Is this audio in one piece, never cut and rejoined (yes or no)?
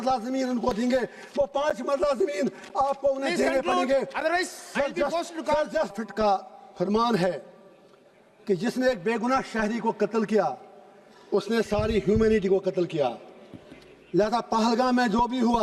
no